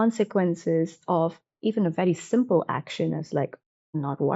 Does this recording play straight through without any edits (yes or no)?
yes